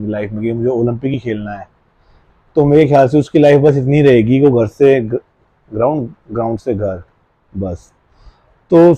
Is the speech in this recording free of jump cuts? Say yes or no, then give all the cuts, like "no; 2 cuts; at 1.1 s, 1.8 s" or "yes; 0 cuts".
yes; 0 cuts